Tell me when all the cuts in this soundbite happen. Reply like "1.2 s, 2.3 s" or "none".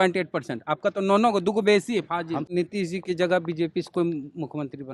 2.5 s